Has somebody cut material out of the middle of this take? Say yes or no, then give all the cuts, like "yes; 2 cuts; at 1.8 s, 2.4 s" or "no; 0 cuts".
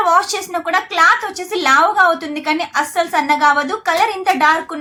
no; 0 cuts